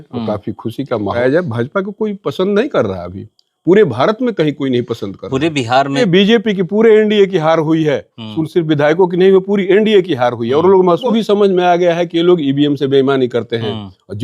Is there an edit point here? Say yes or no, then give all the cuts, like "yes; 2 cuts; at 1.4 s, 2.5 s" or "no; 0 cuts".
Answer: yes; 3 cuts; at 1.2 s, 6.0 s, 11.0 s